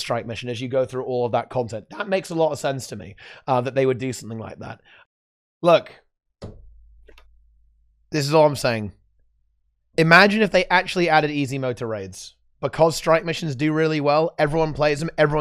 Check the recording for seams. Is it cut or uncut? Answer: cut